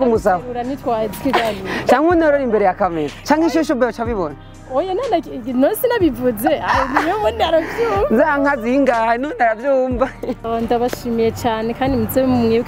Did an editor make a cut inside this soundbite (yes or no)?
yes